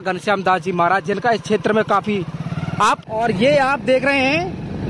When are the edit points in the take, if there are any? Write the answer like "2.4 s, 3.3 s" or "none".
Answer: 3.0 s

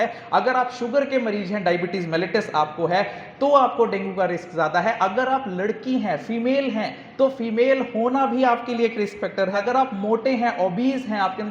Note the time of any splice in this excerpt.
9.6 s

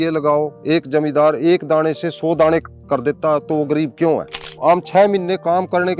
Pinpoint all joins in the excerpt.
4.5 s

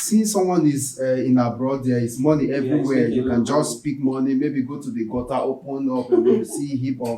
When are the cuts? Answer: none

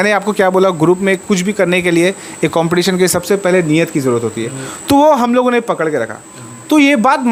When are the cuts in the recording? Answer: none

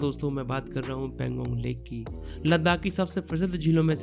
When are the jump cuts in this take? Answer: none

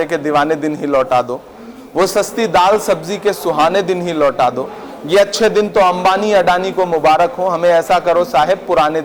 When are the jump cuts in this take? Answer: none

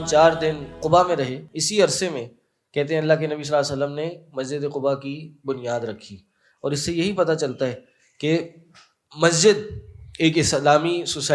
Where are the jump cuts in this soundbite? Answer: 0.8 s, 1.5 s

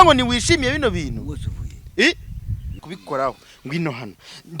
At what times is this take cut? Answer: 2.7 s

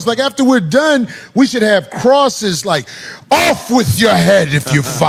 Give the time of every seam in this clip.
none

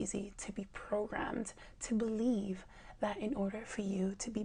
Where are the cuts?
none

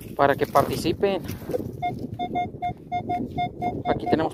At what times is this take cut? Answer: 1.4 s

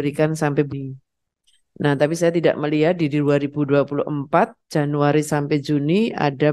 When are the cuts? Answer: none

